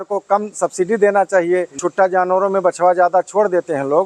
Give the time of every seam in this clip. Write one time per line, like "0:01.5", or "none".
0:01.8

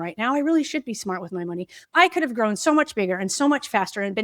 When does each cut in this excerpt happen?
0:01.7

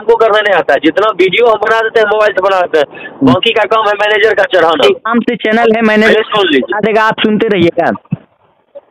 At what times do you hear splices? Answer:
0:04.8

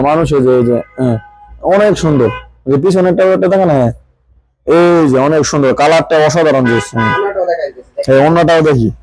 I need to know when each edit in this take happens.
none

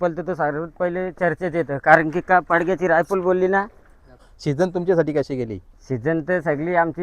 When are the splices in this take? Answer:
0:04.2

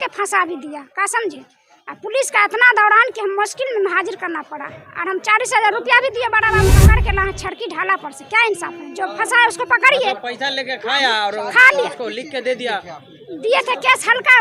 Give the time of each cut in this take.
0:06.8

